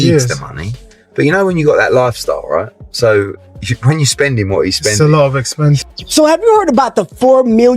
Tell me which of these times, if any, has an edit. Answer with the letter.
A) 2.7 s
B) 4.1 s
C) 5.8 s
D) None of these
C